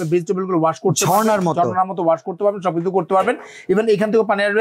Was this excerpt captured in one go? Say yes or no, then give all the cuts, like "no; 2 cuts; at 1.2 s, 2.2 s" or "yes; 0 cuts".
yes; 0 cuts